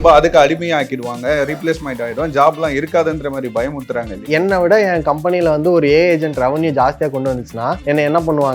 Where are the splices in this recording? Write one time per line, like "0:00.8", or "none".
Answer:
0:04.2
0:07.8